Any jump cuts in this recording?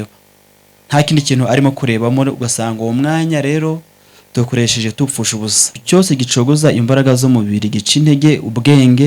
yes; 1 cut; at 5.8 s

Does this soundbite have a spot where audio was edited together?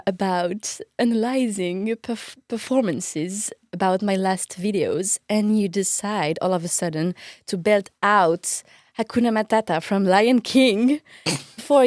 no; 0 cuts

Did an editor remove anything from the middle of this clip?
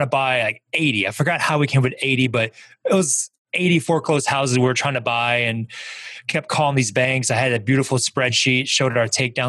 no; 0 cuts

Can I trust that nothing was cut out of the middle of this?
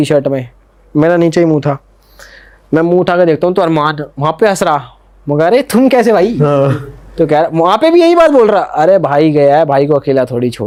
yes; 0 cuts

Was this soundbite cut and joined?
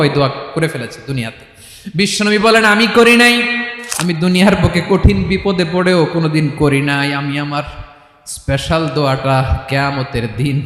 yes; 1 cut; at 3.7 s

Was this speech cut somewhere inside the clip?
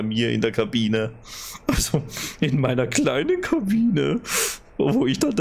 no; 0 cuts

